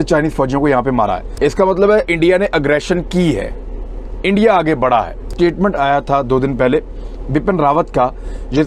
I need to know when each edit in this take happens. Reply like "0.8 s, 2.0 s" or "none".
none